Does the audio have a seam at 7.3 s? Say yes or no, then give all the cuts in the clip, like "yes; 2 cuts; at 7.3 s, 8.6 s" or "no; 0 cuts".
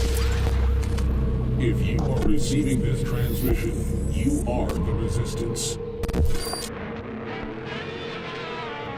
no; 0 cuts